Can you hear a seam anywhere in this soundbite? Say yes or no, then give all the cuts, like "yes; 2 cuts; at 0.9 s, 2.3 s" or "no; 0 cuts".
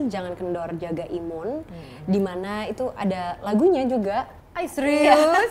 no; 0 cuts